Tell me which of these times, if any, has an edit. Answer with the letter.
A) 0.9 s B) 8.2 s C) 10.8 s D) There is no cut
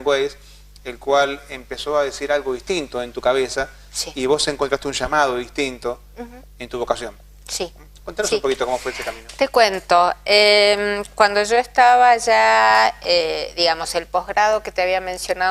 C